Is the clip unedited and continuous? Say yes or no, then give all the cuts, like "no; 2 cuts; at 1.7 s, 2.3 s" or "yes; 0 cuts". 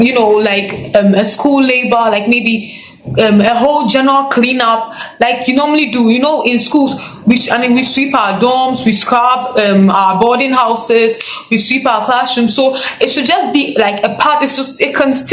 yes; 0 cuts